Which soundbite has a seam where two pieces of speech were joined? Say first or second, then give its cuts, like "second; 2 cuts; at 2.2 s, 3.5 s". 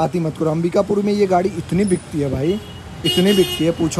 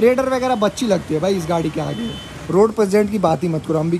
second; 1 cut; at 2.4 s